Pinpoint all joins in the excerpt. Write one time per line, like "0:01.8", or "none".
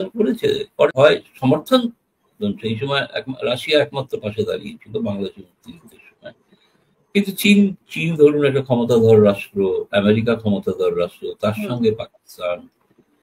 0:00.9